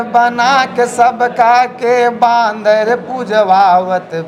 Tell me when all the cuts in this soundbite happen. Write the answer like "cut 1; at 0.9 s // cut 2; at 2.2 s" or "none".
none